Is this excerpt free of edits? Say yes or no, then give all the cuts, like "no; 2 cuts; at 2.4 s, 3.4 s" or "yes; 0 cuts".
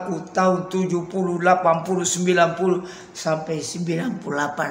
yes; 0 cuts